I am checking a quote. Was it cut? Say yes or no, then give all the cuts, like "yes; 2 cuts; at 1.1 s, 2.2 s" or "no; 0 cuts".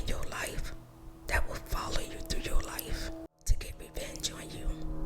yes; 1 cut; at 3.3 s